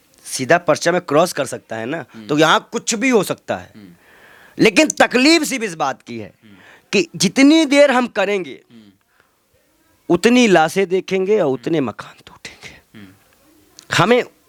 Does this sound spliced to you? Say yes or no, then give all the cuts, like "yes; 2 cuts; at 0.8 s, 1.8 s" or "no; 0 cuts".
no; 0 cuts